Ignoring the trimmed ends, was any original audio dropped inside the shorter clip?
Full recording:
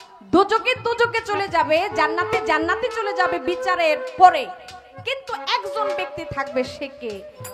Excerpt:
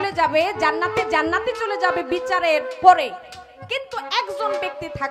no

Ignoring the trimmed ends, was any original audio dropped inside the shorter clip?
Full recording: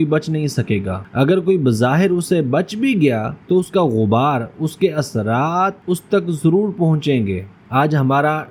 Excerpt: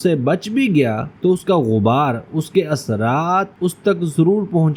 no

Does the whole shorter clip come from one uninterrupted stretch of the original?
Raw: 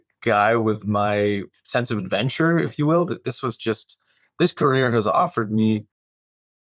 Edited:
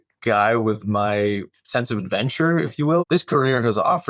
no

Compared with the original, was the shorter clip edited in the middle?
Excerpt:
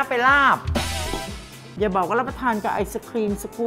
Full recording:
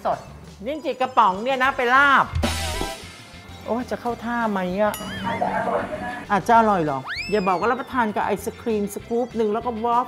yes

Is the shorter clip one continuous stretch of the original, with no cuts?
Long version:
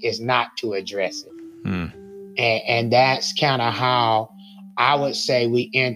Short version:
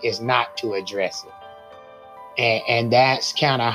yes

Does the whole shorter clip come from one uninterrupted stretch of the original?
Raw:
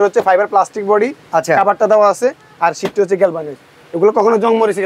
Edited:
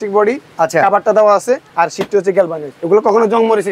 no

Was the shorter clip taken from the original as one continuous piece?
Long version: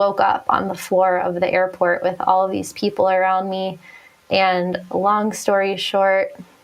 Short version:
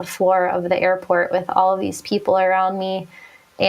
yes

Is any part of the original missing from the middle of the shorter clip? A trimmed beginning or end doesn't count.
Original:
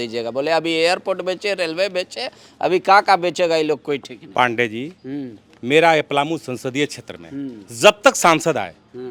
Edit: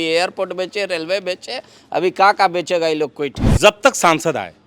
yes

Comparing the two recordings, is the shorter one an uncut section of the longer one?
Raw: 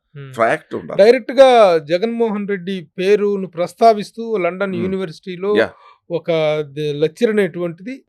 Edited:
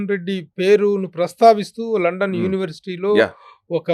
yes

